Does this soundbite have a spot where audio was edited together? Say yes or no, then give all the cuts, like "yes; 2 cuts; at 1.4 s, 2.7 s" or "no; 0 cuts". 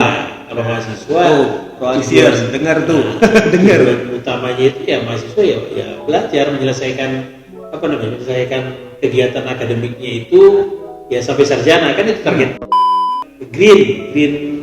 yes; 1 cut; at 12.9 s